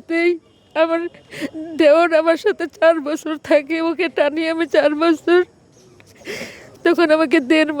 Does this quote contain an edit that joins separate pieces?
yes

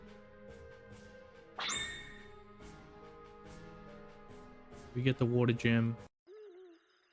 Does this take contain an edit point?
no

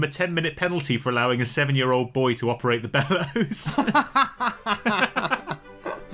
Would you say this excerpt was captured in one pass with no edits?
yes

